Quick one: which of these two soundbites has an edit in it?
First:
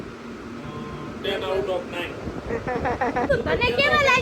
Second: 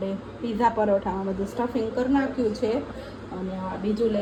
first; 1 cut; at 3.3 s

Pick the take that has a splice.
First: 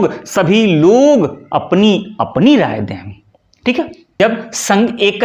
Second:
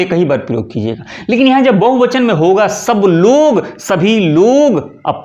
first; 1 cut; at 4.0 s

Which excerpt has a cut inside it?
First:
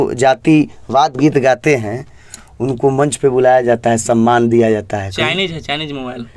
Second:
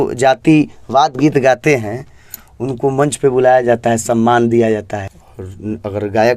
second; 1 cut; at 5.0 s

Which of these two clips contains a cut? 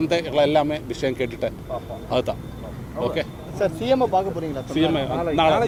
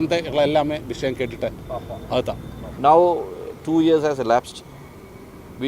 second; 1 cut; at 2.6 s

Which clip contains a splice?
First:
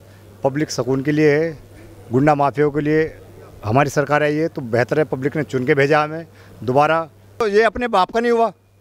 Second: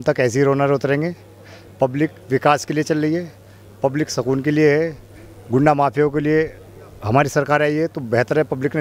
first; 1 cut; at 7.4 s

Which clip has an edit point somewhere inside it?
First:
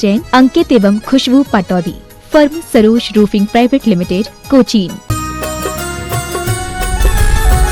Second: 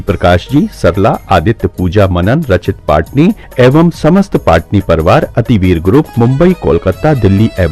first; 1 cut; at 5.0 s

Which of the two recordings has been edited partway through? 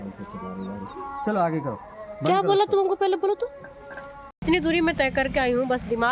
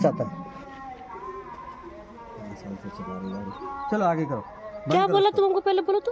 first; 1 cut; at 4.4 s

